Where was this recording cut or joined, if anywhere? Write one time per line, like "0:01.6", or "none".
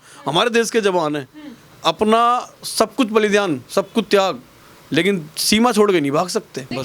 none

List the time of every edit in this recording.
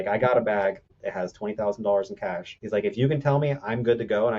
0:00.9
0:02.5

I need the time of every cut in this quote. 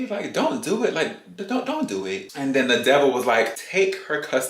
0:02.3
0:03.6

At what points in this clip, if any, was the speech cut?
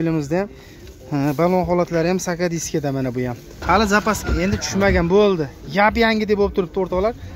0:03.5

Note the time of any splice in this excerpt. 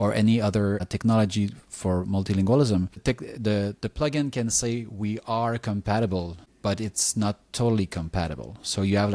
0:06.4

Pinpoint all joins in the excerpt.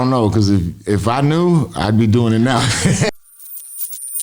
0:03.1

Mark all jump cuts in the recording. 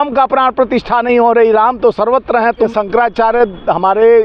none

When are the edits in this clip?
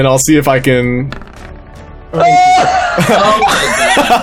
none

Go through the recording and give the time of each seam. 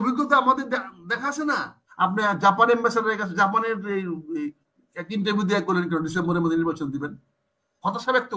0:01.8

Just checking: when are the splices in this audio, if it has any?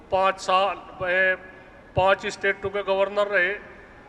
none

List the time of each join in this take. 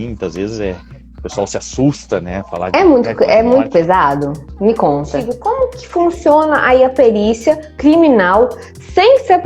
0:05.3

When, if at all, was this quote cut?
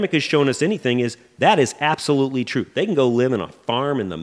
none

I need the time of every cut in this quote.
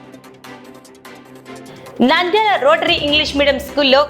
0:01.7

